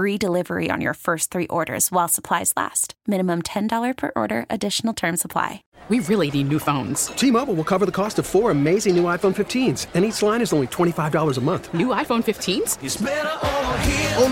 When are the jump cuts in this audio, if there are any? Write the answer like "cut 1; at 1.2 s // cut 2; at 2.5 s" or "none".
cut 1; at 5.7 s